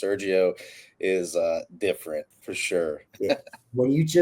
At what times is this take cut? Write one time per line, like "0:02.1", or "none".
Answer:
0:03.1

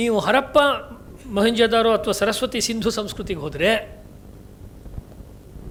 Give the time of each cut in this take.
none

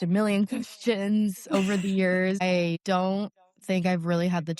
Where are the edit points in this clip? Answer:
0:02.4

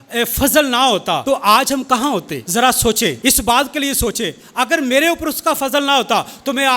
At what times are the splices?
0:01.2
0:02.4
0:03.2

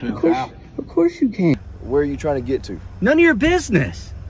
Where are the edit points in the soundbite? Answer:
0:01.5

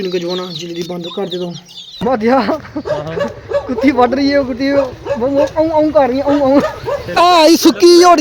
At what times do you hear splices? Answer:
0:02.0
0:07.2

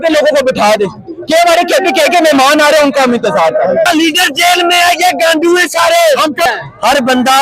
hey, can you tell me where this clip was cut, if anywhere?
0:03.9
0:06.5

